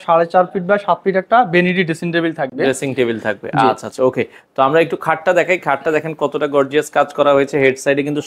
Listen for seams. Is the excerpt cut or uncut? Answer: uncut